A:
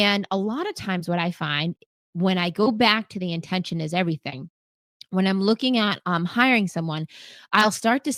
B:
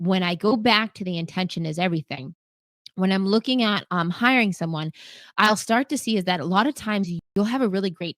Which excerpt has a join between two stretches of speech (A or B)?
B